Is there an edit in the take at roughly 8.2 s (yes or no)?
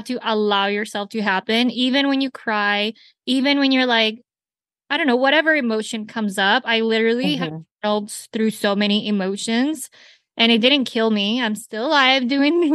no